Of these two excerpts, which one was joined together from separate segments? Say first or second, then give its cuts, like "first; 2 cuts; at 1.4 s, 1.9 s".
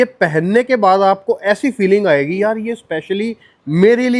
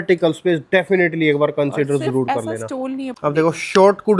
second; 1 cut; at 3.1 s